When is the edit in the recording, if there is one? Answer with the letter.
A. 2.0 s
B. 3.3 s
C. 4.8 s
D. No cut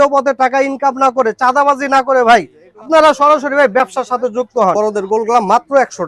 C